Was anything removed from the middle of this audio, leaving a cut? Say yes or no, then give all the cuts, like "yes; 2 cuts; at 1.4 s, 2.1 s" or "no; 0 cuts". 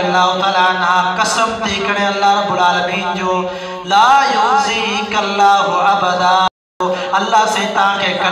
yes; 1 cut; at 6.5 s